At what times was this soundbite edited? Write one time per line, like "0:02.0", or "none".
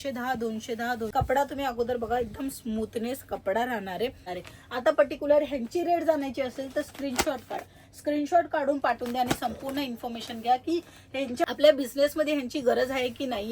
0:01.1
0:04.3
0:11.4